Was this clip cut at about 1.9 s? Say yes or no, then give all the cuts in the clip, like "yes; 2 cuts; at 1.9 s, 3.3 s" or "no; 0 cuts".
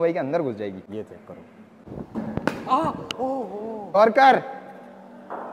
no; 1 cut; at 3.9 s